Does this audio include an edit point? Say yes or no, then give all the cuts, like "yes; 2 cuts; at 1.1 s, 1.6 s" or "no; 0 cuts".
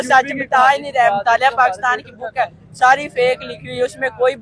no; 0 cuts